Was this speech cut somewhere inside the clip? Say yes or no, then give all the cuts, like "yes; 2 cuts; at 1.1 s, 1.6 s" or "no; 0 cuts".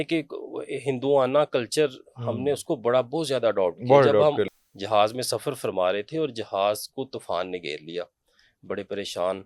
yes; 1 cut; at 4.5 s